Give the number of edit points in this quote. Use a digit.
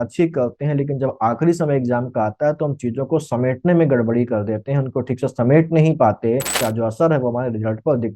1